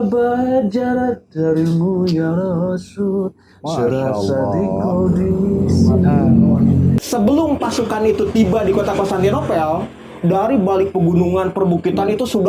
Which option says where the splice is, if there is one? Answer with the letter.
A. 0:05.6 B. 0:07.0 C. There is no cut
B